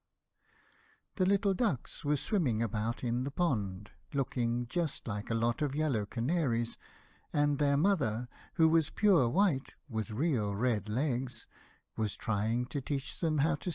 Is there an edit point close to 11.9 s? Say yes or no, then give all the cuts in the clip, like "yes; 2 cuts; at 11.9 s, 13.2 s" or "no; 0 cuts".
no; 0 cuts